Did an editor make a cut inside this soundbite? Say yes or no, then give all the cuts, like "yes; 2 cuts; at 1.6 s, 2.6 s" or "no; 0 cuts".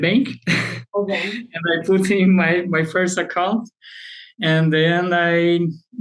no; 0 cuts